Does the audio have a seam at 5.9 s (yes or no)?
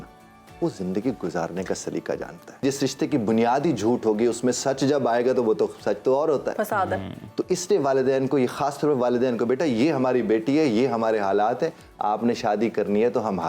no